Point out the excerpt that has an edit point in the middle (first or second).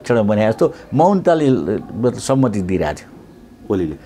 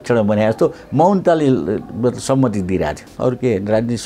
second